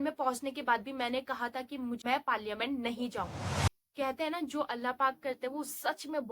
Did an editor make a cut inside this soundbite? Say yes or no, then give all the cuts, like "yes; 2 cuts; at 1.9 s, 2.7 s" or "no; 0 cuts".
yes; 2 cuts; at 2.0 s, 3.8 s